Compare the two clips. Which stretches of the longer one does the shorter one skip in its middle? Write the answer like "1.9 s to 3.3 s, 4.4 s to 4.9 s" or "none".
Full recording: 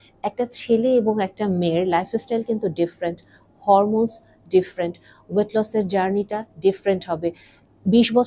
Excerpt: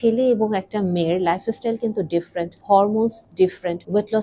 3.2 s to 3.5 s, 4.5 s to 4.9 s